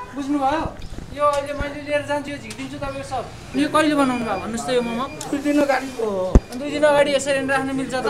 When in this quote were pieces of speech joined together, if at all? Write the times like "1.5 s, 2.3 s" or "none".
3.4 s